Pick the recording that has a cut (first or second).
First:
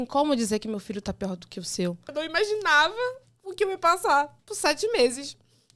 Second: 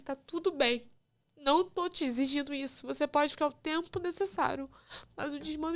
first